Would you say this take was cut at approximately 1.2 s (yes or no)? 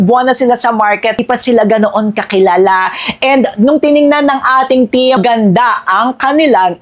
yes